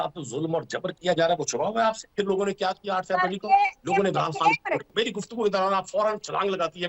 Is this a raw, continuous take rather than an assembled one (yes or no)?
no